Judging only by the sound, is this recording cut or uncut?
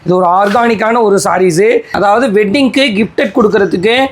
cut